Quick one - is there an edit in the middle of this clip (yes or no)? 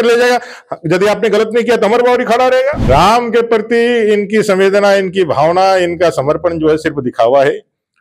yes